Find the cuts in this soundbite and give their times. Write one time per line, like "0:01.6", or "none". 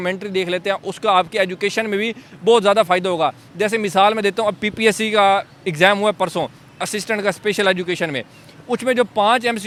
none